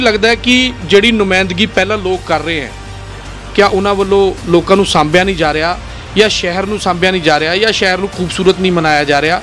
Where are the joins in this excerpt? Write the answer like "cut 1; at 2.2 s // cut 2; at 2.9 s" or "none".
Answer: none